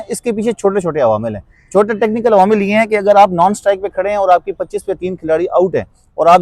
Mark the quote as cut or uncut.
uncut